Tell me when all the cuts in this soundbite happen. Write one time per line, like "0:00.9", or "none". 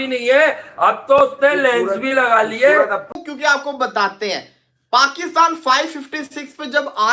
0:03.0